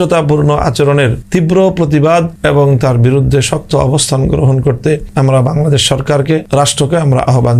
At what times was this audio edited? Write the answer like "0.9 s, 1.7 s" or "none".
1.2 s, 2.3 s, 5.1 s, 6.5 s